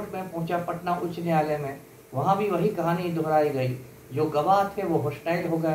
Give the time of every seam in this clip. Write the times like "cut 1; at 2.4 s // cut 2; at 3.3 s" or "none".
none

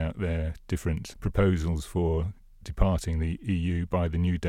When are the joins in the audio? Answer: cut 1; at 1.1 s // cut 2; at 3.4 s

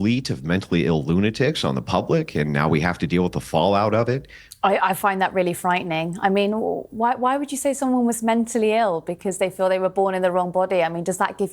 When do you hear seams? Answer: cut 1; at 4.4 s

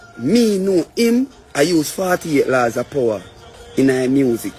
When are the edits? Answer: none

